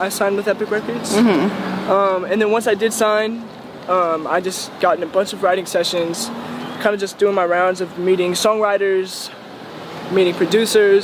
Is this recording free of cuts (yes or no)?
yes